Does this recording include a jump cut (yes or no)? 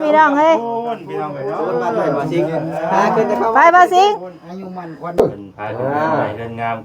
yes